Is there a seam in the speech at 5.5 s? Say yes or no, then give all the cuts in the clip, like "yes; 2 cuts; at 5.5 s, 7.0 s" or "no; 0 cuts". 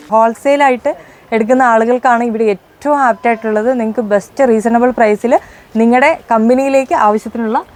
no; 0 cuts